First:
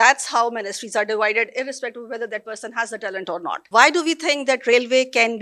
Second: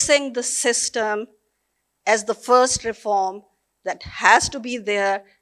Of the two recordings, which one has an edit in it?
first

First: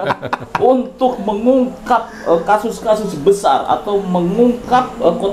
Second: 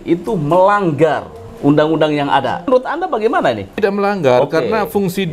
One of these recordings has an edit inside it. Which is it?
second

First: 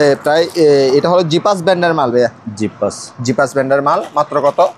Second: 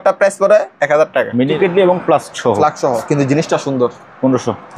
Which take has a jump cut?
second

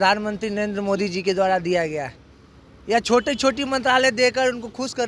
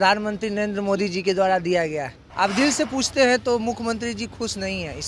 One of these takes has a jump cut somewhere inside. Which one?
second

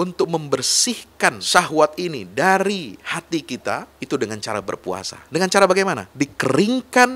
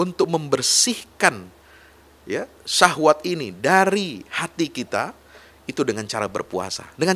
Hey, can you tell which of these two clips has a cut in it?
first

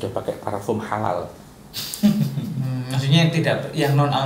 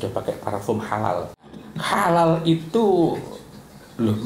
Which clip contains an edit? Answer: second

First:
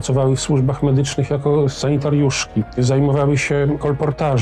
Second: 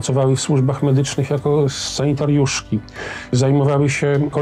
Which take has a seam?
first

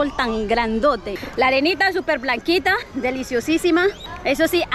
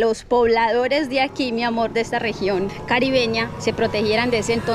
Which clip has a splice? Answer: first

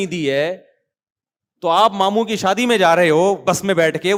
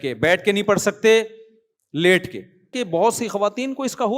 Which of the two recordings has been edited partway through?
second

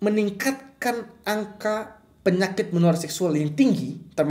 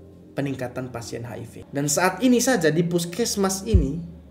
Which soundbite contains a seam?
second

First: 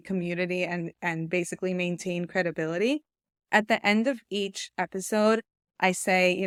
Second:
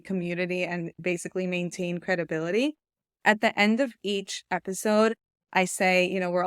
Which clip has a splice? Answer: second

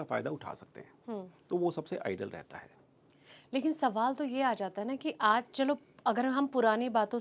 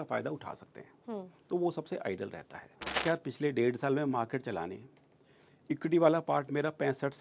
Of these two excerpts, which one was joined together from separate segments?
second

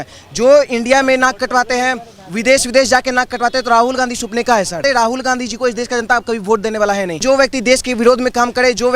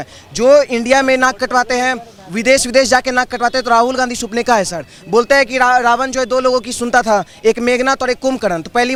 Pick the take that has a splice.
first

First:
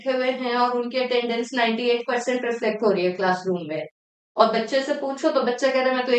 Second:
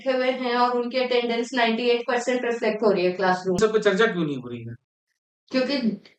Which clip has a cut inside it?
second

